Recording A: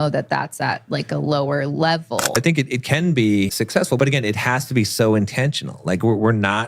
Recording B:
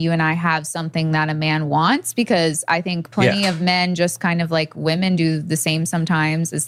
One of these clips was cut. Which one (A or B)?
A